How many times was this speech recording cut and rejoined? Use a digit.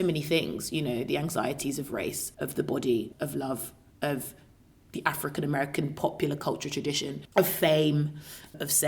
2